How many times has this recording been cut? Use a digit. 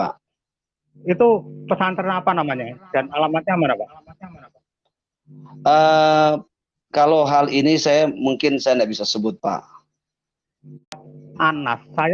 1